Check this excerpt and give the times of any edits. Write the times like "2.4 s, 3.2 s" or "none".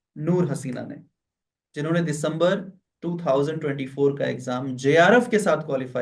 none

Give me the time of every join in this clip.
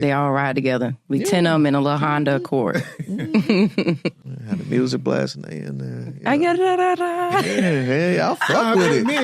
4.3 s

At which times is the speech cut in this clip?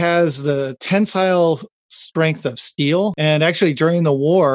3.2 s

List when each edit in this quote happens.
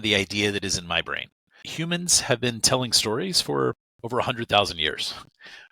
1.6 s

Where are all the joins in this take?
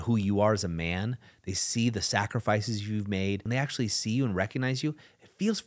3.4 s

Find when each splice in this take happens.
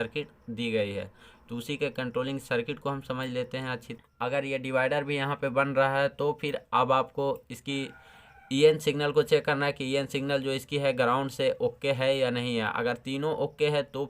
3.9 s

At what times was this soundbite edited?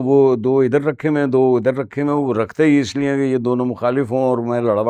none

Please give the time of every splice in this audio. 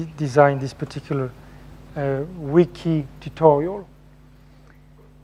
none

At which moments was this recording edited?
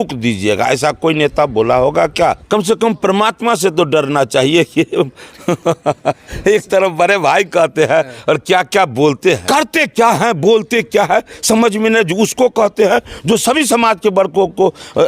2.4 s, 9.4 s

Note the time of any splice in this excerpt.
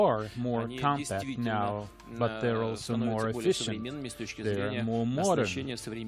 none

